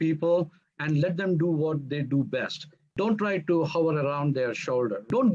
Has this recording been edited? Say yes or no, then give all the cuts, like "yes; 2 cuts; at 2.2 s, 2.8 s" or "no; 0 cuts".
no; 0 cuts